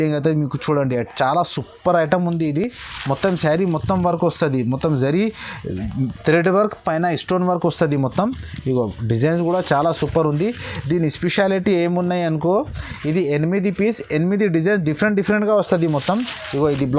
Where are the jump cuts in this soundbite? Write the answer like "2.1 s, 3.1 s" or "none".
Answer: none